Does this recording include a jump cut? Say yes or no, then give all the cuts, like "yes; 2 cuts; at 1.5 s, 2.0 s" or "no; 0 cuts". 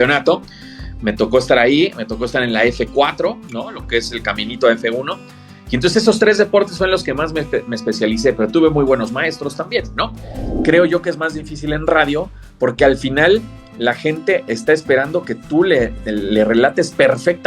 yes; 1 cut; at 10.5 s